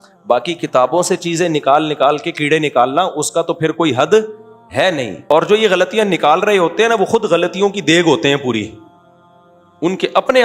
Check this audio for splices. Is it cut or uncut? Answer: cut